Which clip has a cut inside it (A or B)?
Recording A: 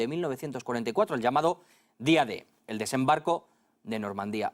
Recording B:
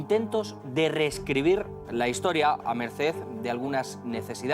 B